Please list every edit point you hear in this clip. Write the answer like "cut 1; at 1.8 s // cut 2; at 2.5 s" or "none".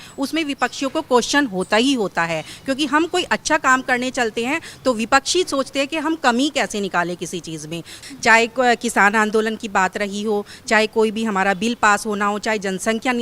cut 1; at 7.9 s